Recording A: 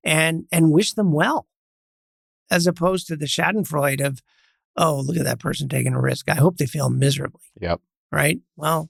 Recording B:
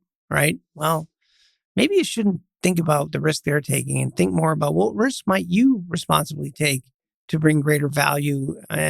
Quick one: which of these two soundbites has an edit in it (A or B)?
B